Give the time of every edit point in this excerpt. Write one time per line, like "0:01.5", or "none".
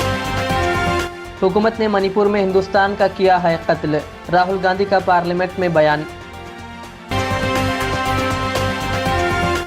0:01.2